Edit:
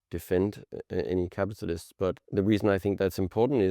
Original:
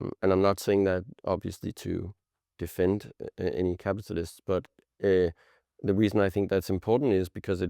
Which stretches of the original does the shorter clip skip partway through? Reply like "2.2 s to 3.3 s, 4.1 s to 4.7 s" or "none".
4.7 s to 5.7 s

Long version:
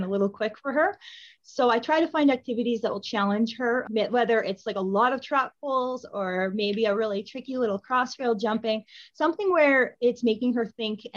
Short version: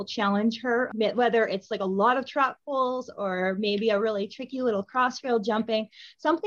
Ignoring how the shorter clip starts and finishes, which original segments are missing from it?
none

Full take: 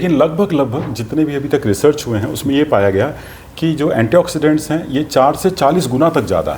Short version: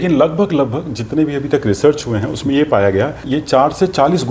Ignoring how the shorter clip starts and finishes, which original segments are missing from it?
3.2 s to 4.9 s

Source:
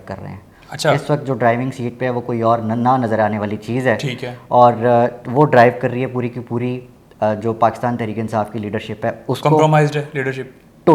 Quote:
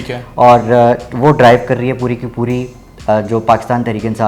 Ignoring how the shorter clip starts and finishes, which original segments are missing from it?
none

